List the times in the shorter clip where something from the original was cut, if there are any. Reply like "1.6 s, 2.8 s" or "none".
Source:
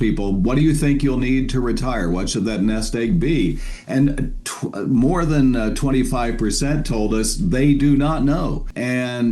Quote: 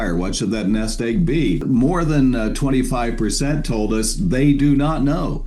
1.6 s